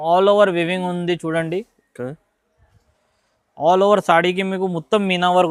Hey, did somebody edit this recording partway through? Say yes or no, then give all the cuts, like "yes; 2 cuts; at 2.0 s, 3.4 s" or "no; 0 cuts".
no; 0 cuts